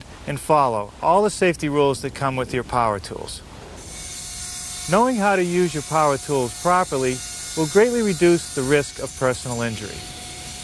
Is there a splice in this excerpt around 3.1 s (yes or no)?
yes